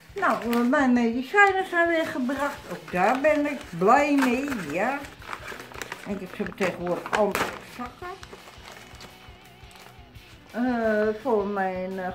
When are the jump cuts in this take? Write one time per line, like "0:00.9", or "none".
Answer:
none